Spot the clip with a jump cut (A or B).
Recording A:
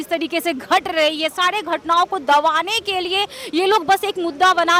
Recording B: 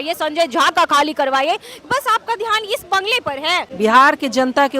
B